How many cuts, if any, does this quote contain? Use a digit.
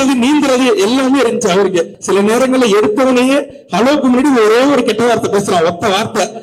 1